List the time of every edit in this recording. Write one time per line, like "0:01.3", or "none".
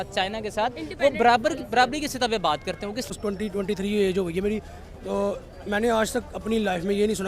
0:03.1